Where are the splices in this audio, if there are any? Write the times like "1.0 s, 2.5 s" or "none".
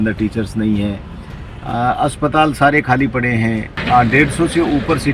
3.7 s